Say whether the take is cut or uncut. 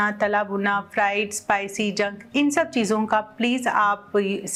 uncut